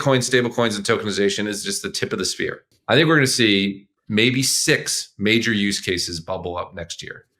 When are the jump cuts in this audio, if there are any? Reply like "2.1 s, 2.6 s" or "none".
2.7 s